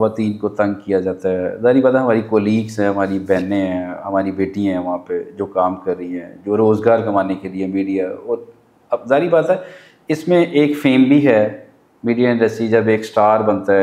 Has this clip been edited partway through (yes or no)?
no